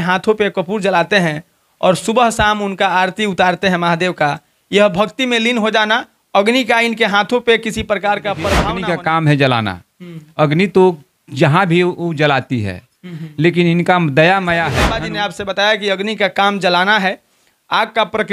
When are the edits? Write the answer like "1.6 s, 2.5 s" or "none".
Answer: 8.6 s, 15.0 s